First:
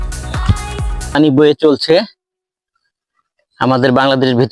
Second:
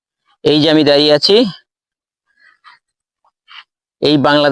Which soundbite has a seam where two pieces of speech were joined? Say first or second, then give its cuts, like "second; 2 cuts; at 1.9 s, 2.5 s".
first; 1 cut; at 1.1 s